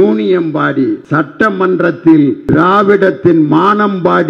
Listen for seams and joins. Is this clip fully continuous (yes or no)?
no